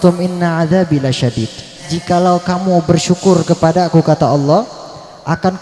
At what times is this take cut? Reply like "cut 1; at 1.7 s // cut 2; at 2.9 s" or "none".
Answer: cut 1; at 1.9 s